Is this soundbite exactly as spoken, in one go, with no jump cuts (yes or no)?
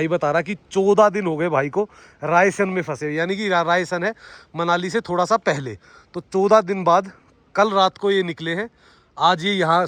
yes